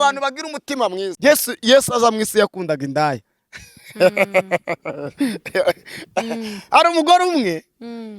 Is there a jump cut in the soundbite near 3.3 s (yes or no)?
no